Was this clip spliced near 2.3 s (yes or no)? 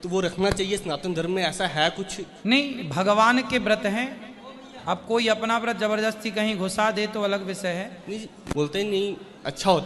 no